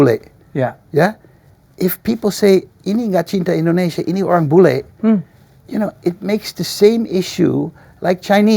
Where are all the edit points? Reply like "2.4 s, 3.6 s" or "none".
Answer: none